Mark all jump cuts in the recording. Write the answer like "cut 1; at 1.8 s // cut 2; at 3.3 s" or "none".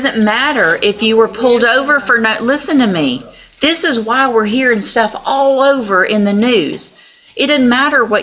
none